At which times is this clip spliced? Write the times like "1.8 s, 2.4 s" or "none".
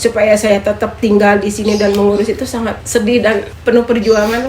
2.8 s, 3.5 s

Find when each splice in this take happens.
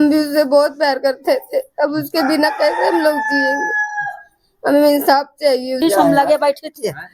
5.8 s

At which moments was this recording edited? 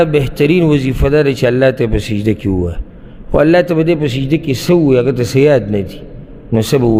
none

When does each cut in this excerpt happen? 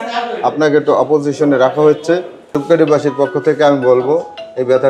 2.6 s

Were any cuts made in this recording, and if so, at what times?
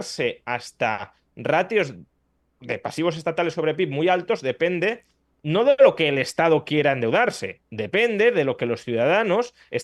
none

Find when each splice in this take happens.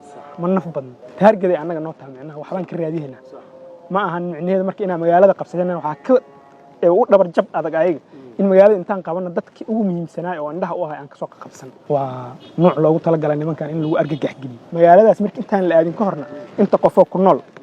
1.0 s, 11.9 s, 14.6 s

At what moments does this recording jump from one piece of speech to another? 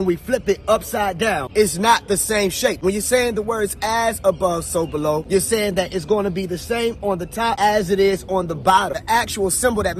none

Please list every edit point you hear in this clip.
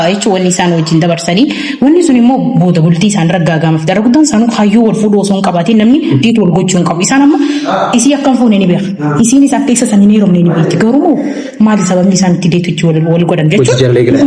none

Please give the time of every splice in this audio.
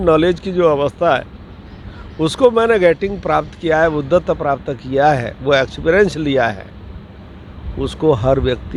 none

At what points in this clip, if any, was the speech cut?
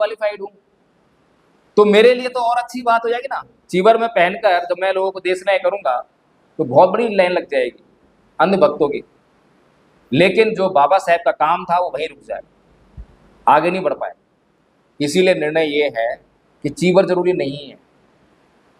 none

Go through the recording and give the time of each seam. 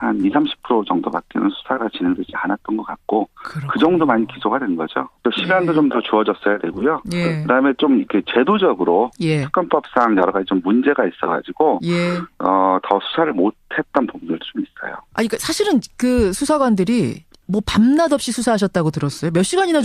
7.7 s

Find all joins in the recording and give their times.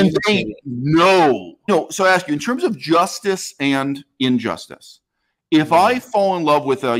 1.7 s

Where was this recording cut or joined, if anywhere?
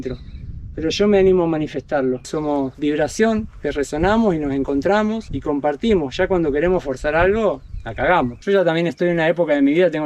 2.3 s, 8.4 s

